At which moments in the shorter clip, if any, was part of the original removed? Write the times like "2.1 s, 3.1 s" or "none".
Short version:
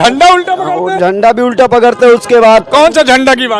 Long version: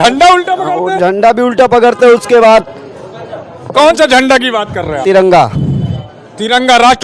2.7 s